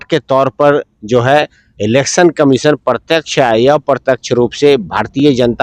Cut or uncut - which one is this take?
uncut